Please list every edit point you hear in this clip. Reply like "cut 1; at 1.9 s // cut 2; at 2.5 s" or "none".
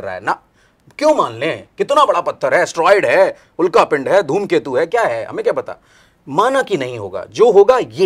none